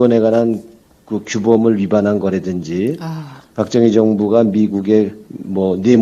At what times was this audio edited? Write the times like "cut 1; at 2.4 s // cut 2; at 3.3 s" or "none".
cut 1; at 2.0 s